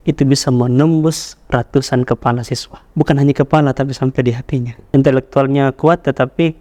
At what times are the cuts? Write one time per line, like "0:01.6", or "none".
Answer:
0:04.7